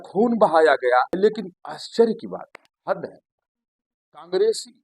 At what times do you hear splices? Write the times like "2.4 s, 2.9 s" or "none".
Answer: 1.1 s